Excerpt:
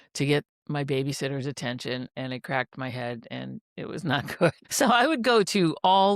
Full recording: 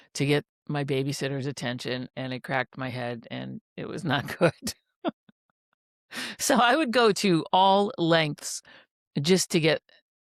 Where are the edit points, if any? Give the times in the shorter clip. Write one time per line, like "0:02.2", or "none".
0:04.6